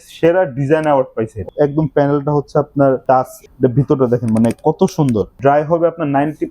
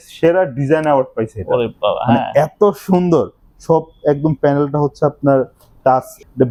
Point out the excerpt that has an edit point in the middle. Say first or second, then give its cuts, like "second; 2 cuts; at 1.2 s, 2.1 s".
first; 3 cuts; at 1.4 s, 3.0 s, 5.3 s